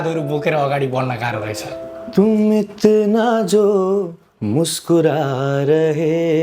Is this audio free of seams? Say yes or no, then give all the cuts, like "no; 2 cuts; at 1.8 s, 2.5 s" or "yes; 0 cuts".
no; 1 cut; at 2.0 s